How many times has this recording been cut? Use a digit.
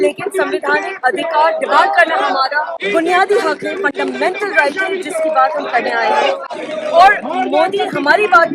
1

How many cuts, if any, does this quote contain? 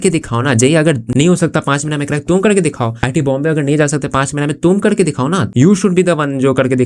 1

